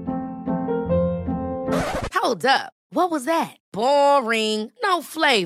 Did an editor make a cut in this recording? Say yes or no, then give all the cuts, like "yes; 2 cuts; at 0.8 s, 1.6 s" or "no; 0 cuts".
no; 0 cuts